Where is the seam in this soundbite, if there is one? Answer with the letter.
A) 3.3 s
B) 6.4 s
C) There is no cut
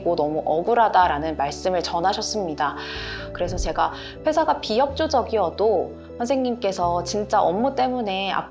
A